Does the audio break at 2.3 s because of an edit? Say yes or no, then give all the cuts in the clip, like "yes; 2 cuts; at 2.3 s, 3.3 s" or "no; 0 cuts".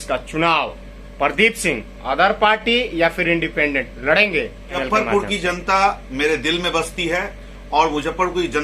no; 1 cut; at 4.8 s